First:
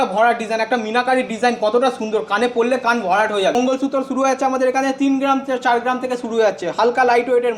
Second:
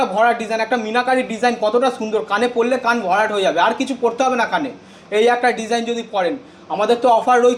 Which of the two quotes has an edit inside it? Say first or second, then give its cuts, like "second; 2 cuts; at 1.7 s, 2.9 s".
first; 1 cut; at 3.5 s